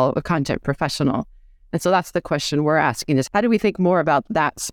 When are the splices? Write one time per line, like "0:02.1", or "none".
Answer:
0:03.3